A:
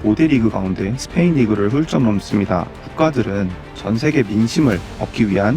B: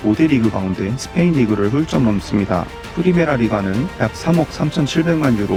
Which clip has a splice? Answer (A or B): A